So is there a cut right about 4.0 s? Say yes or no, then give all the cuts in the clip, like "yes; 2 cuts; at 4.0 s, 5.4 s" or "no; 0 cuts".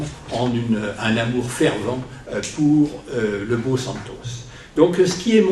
yes; 1 cut; at 4.0 s